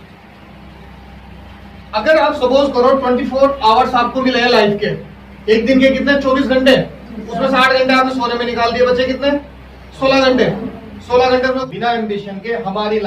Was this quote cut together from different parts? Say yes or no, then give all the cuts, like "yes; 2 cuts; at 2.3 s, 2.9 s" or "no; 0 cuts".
yes; 1 cut; at 11.6 s